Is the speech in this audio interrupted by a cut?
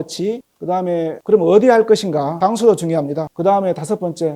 yes; 1 cut; at 3.2 s

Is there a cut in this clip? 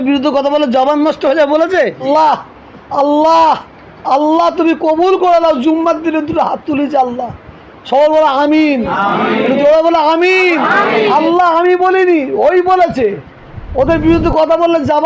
yes; 1 cut; at 2.0 s

